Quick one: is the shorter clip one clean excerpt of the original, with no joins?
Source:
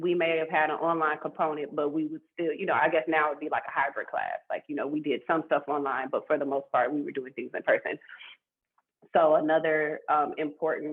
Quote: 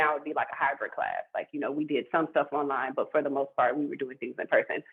yes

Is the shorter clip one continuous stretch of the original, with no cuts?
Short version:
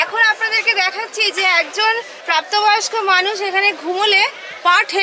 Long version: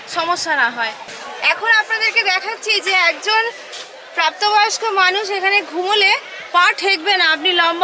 no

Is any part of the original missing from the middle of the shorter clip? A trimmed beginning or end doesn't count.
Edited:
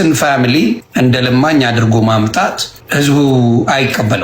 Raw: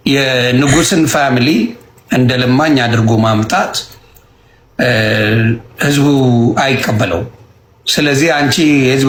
yes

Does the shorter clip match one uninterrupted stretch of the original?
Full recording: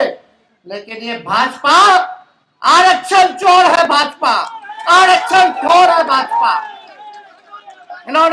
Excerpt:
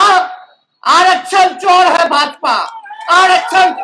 yes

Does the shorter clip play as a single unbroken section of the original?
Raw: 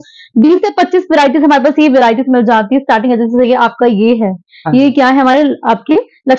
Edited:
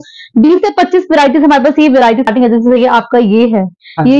no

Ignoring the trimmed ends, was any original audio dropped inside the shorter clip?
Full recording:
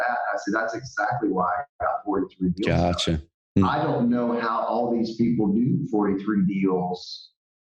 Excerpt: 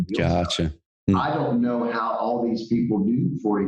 no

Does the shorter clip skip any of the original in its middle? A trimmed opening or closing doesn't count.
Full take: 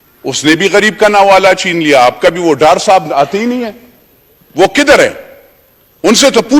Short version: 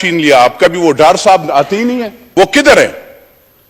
yes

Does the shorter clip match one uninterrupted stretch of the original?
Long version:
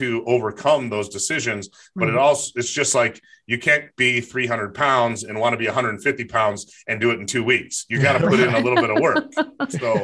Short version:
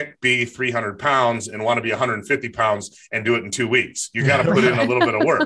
yes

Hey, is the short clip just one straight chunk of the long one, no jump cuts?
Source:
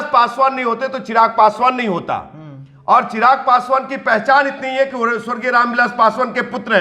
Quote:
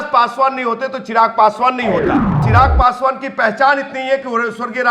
no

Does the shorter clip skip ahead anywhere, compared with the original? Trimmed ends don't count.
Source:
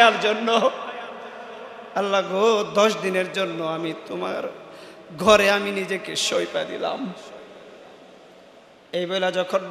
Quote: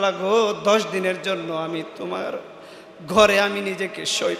no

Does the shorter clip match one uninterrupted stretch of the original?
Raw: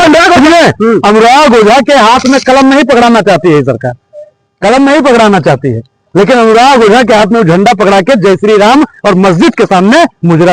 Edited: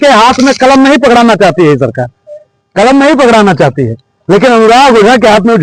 yes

